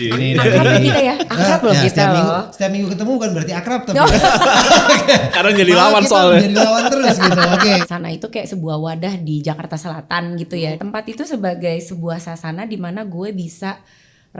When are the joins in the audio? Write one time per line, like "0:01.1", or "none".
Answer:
0:07.8
0:10.6